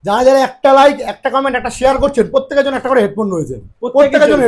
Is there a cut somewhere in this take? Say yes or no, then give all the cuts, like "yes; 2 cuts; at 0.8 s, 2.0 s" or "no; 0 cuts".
no; 0 cuts